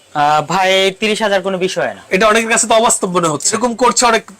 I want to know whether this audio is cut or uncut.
cut